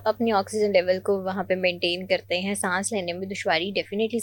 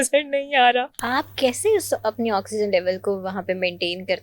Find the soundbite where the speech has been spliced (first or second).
second